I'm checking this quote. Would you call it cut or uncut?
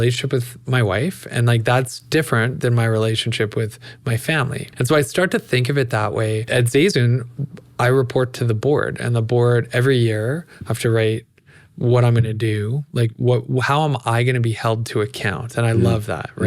cut